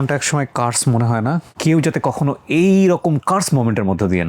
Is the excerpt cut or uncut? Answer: uncut